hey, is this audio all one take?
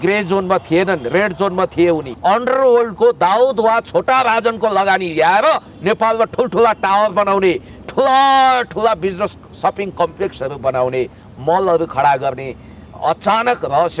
no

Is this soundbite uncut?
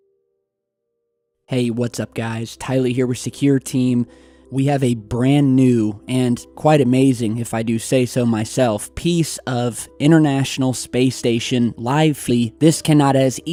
yes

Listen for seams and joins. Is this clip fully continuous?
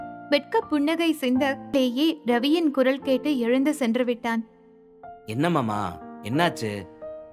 no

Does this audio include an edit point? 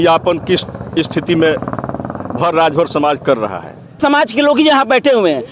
yes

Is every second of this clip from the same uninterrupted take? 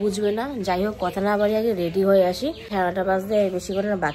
yes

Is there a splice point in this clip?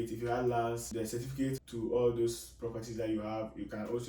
yes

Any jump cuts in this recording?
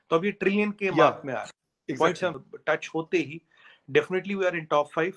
yes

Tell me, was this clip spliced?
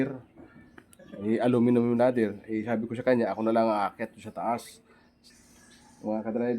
yes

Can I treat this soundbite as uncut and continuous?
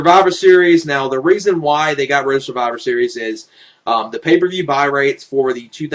no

